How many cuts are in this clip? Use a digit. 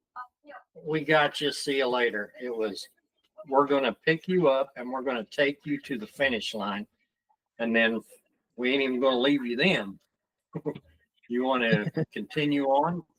0